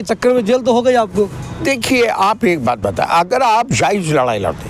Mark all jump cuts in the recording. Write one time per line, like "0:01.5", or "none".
none